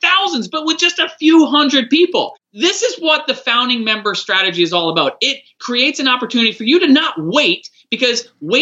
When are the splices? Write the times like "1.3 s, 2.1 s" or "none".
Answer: 2.3 s, 5.6 s